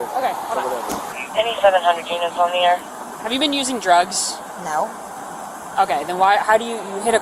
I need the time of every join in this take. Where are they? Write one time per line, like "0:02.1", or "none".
0:01.1